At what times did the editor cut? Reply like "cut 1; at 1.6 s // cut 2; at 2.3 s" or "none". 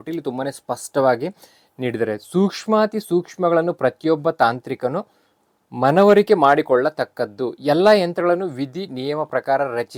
none